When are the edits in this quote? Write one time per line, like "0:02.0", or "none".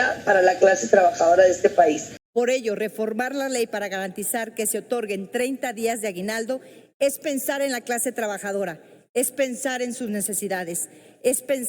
0:02.1